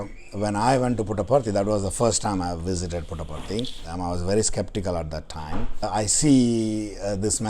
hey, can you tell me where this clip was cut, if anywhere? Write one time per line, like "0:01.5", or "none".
0:03.9
0:05.8